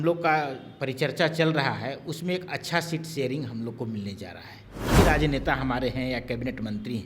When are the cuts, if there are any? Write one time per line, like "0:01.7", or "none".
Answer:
0:05.0